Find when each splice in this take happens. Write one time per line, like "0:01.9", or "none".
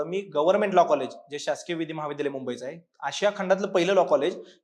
none